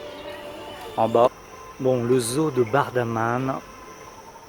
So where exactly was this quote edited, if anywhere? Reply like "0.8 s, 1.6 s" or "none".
1.3 s